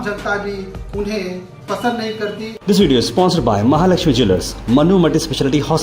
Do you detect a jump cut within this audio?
yes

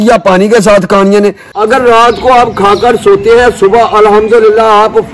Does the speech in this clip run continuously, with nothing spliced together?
no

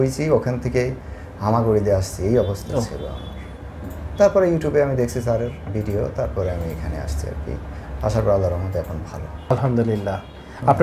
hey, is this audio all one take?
no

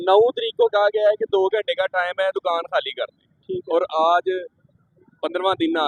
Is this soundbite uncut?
yes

